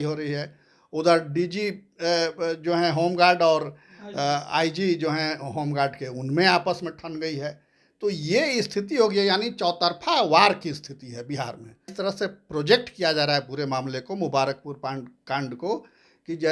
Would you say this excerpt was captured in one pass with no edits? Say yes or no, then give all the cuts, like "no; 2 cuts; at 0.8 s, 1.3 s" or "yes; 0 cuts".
no; 1 cut; at 11.9 s